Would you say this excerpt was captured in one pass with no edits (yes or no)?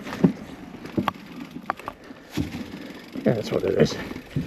yes